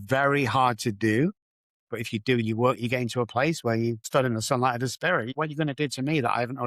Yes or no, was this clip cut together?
yes